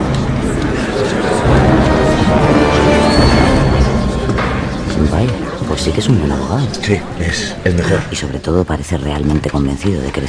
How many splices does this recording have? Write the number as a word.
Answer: one